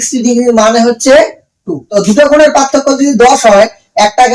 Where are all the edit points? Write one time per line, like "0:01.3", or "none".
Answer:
0:01.8